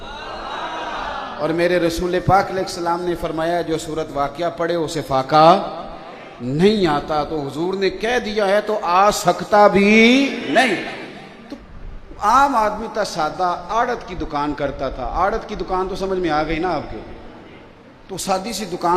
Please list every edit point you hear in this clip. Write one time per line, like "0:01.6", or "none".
0:11.6